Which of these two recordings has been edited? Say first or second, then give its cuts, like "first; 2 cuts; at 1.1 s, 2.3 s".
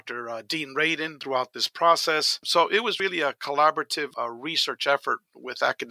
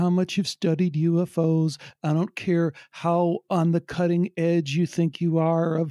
first; 3 cuts; at 1.2 s, 2.4 s, 4.1 s